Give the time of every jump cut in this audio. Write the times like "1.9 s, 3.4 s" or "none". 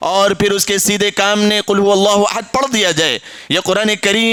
none